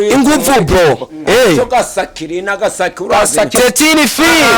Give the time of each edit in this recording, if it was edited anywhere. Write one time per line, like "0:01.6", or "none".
0:03.5